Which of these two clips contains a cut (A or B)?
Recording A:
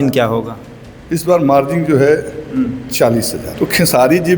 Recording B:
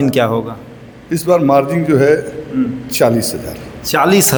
A